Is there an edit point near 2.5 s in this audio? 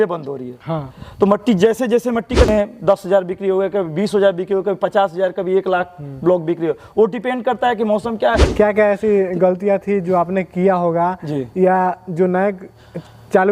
yes; 2 cuts; at 2.5 s, 8.5 s

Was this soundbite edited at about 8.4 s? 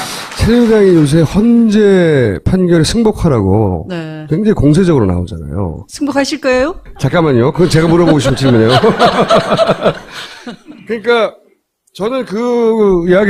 yes; 1 cut; at 8.4 s

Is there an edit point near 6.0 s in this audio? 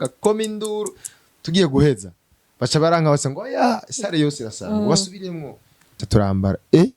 yes; 1 cut; at 6.0 s

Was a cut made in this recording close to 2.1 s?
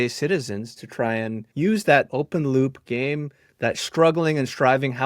yes; 2 cuts; at 1.4 s, 2.1 s

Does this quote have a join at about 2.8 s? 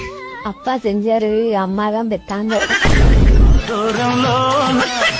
yes; 1 cut; at 2.8 s

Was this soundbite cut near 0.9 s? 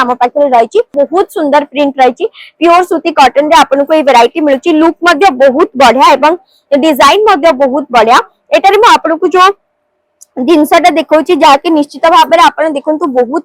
yes; 1 cut; at 0.9 s

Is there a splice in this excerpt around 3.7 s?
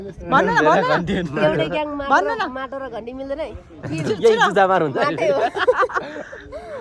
no; 0 cuts

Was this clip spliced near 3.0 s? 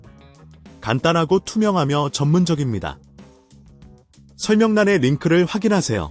yes; 3 cuts; at 0.8 s, 3.0 s, 4.5 s

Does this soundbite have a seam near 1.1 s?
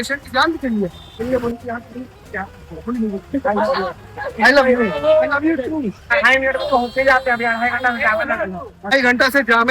yes; 3 cuts; at 1.1 s, 6.1 s, 8.9 s

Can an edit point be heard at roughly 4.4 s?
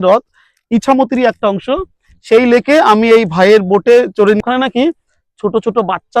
yes; 1 cut; at 4.4 s

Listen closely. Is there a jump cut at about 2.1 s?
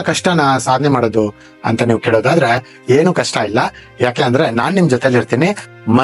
no; 0 cuts

